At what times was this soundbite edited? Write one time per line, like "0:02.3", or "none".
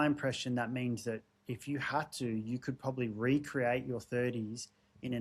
none